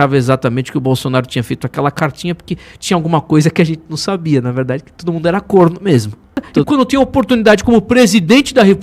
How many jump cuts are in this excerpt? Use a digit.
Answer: 1